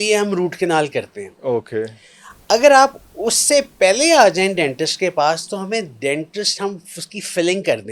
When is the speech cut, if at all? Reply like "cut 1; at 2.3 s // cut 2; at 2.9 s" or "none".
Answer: none

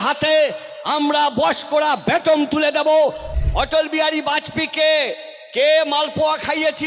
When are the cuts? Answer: cut 1; at 3.3 s

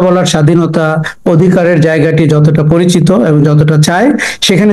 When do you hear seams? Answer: none

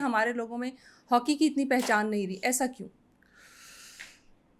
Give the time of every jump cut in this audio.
none

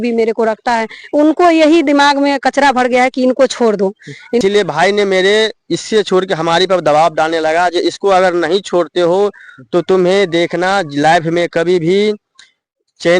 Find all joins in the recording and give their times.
cut 1; at 4.4 s

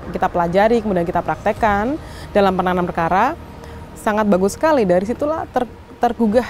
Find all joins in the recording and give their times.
none

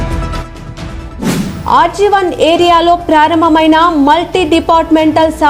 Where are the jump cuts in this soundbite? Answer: cut 1; at 1.4 s

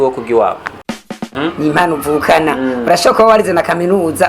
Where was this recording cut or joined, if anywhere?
cut 1; at 1.1 s

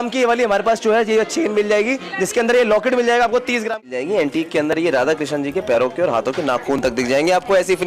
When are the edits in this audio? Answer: cut 1; at 3.8 s

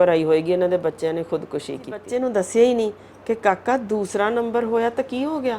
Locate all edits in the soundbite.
cut 1; at 2.0 s

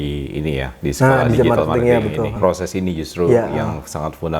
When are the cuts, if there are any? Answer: cut 1; at 2.4 s

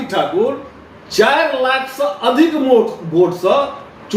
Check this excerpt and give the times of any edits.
none

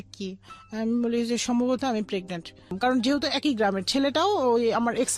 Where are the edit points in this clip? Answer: cut 1; at 2.8 s

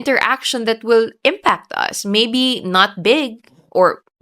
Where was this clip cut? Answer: none

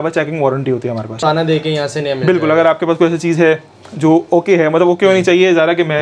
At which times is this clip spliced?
cut 1; at 1.2 s

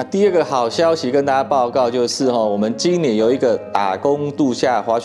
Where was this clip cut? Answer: none

